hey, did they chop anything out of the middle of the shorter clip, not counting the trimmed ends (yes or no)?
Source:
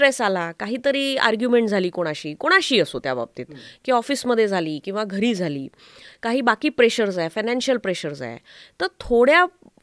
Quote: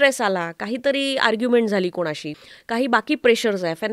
yes